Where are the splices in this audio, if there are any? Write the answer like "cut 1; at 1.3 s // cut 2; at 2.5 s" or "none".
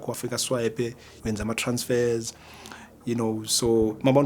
cut 1; at 1.1 s